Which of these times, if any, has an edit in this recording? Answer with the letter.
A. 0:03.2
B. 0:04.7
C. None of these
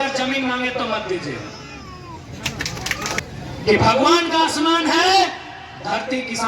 A